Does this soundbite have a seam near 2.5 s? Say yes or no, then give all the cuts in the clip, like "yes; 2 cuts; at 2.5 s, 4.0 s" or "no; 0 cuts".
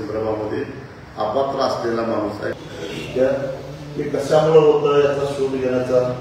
yes; 1 cut; at 2.5 s